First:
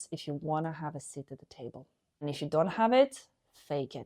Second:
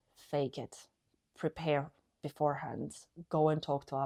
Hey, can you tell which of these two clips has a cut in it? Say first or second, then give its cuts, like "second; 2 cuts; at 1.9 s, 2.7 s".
first; 1 cut; at 2.2 s